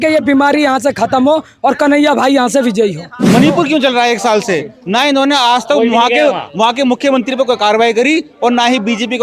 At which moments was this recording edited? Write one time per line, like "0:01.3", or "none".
0:03.1